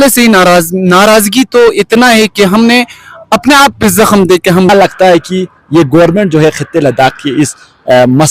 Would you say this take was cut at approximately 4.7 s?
yes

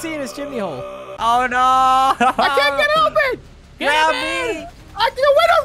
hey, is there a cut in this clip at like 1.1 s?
yes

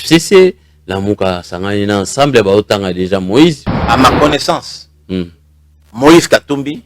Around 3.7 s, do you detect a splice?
yes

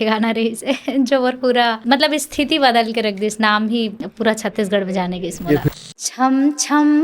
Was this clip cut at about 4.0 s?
yes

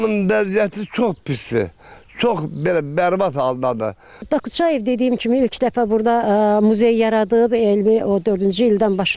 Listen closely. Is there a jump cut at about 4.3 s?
yes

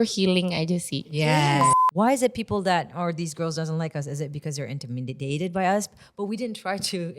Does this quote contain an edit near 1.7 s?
yes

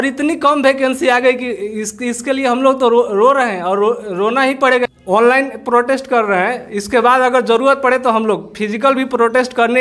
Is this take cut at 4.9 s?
yes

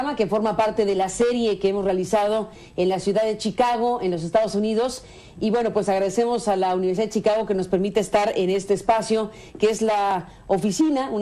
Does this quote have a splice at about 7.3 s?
no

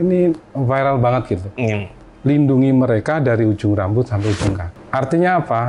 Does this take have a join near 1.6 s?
no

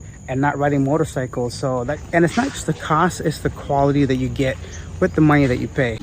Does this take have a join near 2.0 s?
yes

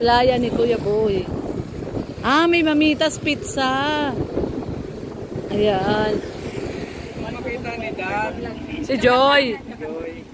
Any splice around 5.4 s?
no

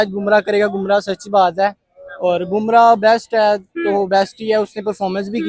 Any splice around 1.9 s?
no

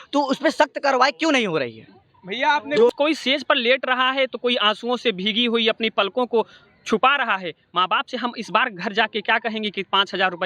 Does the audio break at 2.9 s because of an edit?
yes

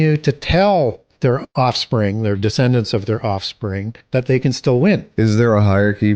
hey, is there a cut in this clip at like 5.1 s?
yes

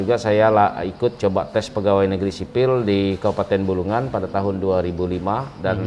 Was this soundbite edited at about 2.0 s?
no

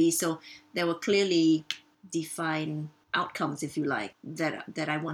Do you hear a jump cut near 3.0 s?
yes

